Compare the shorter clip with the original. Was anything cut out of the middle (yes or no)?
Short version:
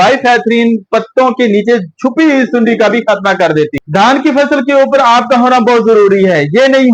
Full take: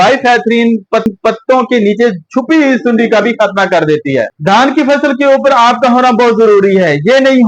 yes